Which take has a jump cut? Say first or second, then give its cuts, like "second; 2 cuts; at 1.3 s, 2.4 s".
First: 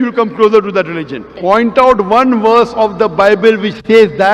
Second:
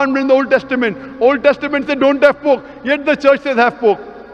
first; 1 cut; at 1.3 s